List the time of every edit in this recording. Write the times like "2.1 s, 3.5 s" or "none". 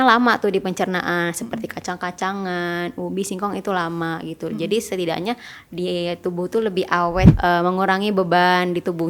7.3 s